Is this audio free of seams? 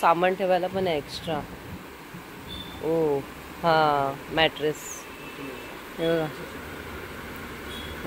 yes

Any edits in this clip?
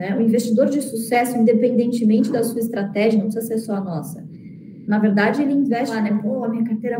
yes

